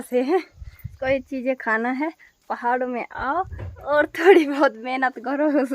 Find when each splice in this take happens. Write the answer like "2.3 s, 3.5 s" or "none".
0.9 s